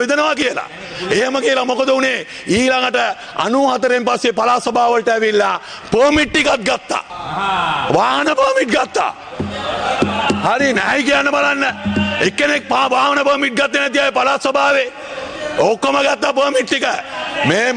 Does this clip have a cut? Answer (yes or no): no